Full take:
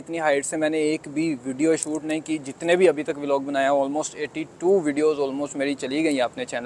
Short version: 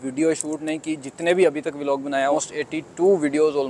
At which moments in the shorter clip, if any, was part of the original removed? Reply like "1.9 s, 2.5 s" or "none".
2.3 s

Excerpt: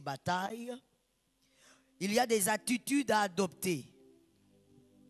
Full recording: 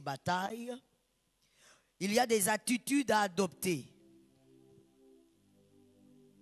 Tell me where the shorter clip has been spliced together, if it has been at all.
3.9 s

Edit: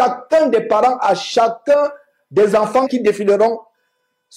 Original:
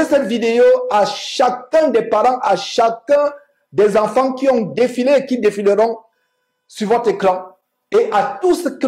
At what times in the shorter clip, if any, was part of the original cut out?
2.9 s

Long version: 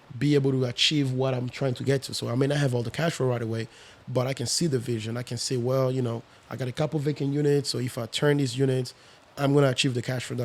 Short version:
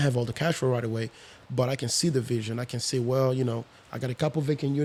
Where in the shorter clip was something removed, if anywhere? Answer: none

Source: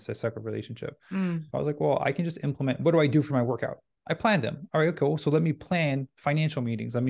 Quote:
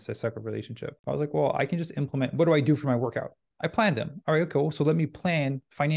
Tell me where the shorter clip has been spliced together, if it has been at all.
1.0 s

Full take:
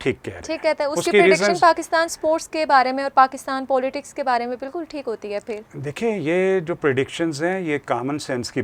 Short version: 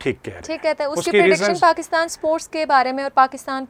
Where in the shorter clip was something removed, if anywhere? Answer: none

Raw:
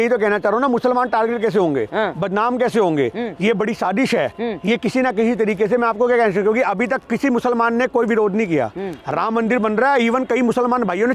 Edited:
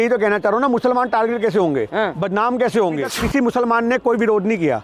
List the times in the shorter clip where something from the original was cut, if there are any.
3.1 s

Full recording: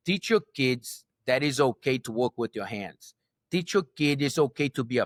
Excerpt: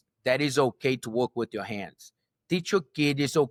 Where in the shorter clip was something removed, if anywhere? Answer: none

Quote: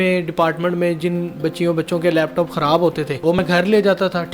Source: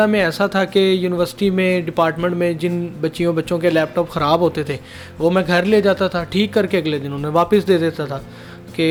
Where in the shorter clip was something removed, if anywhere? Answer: 3.4 s

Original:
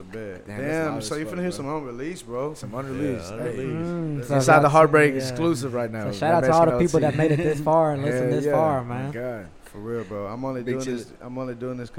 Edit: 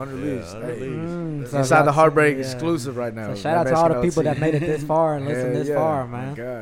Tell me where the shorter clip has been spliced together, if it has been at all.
none

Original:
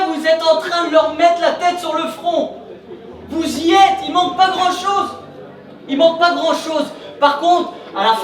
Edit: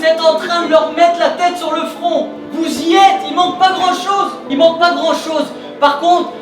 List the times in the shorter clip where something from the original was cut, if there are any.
2.4 s, 4.4 s

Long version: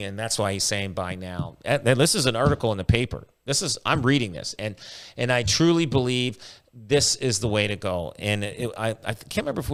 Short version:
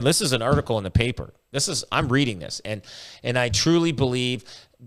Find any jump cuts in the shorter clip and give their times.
none

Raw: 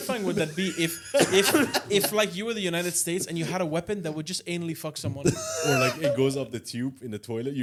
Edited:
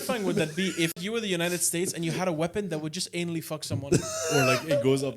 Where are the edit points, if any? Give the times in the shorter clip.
1.0 s

